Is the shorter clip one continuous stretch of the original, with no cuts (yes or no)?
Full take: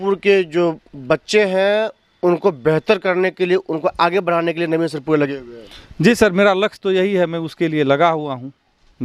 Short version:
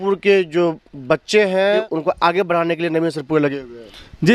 no